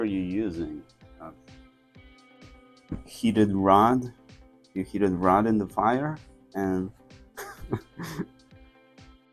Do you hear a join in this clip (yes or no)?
no